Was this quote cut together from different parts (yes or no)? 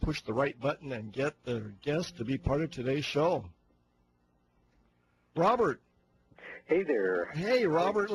no